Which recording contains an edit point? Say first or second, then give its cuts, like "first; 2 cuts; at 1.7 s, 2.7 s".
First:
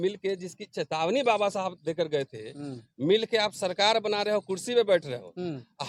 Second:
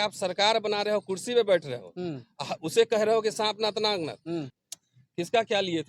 second; 1 cut; at 4.5 s